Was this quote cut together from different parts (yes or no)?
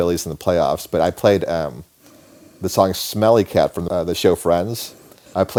no